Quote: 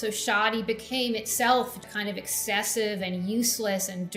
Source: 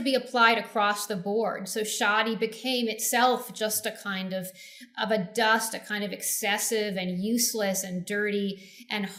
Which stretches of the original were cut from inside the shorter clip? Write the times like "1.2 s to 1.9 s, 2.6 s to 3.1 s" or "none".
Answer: 3.5 s to 5.7 s